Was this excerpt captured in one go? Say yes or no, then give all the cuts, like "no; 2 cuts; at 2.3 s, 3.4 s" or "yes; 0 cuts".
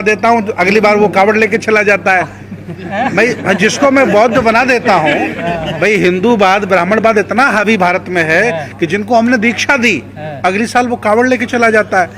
yes; 0 cuts